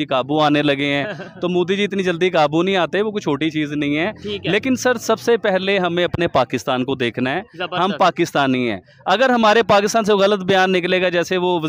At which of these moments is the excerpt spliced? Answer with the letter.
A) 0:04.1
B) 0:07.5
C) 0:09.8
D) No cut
D